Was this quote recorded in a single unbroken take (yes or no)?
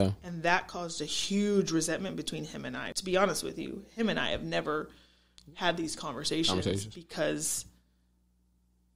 no